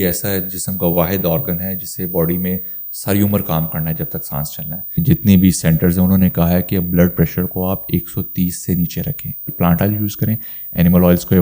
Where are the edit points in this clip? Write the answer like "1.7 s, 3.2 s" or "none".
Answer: 5.0 s, 9.5 s